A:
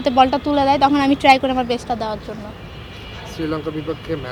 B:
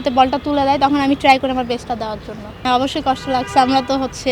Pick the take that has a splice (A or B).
B